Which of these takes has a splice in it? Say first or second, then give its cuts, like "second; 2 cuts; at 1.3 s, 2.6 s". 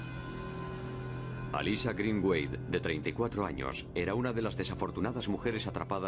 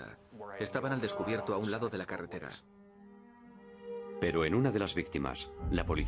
second; 1 cut; at 1.2 s